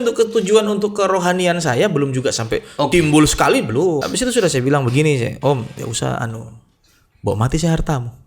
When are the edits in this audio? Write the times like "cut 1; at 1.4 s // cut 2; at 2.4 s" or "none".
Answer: cut 1; at 4.0 s